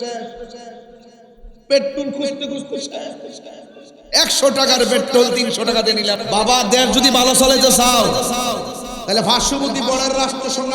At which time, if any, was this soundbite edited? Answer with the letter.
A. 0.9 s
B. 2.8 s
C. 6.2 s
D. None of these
C